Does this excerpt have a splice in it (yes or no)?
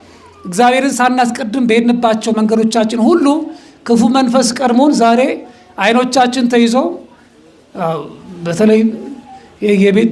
no